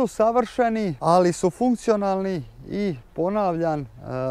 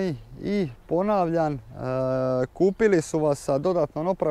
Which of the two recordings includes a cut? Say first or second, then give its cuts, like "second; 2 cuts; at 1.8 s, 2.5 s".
first; 1 cut; at 0.9 s